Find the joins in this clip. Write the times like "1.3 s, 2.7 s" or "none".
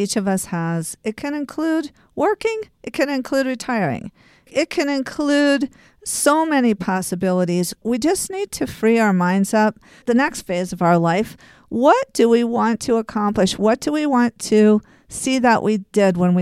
4.5 s, 7.8 s, 10.0 s